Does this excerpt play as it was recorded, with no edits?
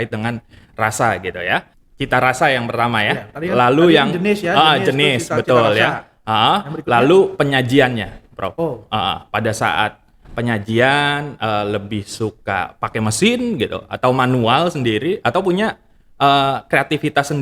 no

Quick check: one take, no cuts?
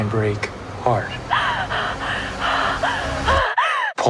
yes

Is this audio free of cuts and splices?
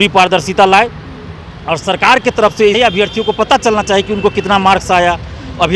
no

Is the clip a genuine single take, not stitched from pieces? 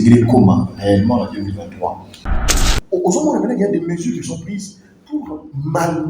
no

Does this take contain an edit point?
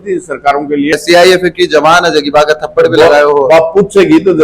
yes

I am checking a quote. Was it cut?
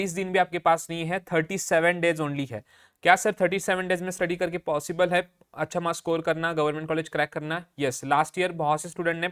no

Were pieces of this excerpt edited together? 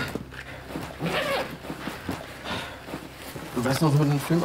yes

